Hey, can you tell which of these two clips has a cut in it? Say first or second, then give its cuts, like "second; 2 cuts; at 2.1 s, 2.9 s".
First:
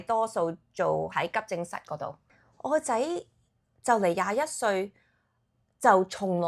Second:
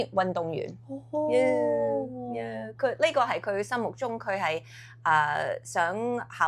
first; 1 cut; at 2.3 s